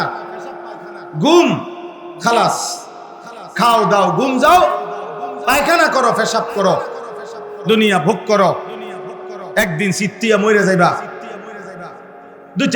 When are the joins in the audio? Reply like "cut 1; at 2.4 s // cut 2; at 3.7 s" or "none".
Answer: none